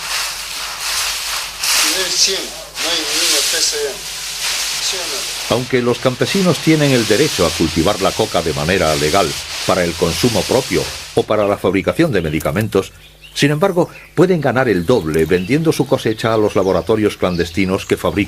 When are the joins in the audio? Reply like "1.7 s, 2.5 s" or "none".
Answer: 8.3 s